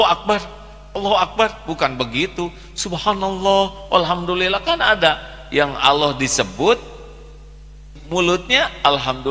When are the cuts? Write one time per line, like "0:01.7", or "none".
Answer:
0:07.9